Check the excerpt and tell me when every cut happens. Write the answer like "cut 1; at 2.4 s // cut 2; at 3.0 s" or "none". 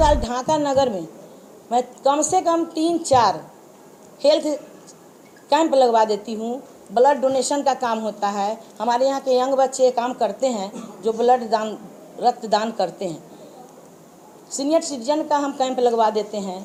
none